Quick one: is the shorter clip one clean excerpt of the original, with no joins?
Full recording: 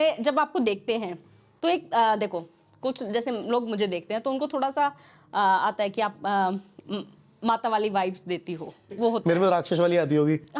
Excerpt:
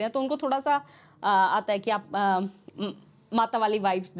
yes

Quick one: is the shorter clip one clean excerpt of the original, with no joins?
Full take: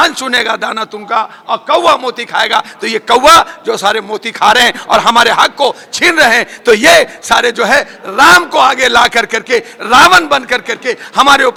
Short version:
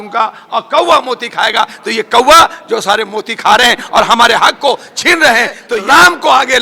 no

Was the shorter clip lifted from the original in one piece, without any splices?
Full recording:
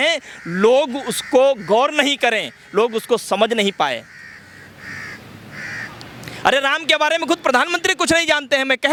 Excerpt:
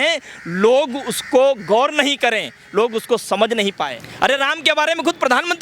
no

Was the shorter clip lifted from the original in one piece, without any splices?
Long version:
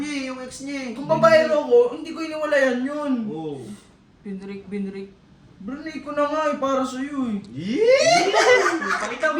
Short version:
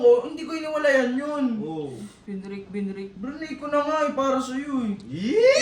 no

